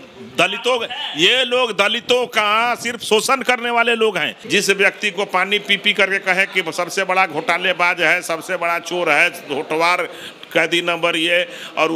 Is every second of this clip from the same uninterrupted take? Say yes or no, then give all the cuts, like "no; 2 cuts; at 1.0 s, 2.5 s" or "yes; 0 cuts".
no; 1 cut; at 4.3 s